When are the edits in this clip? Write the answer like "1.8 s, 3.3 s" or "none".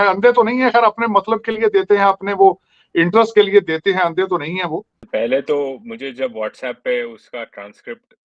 4.9 s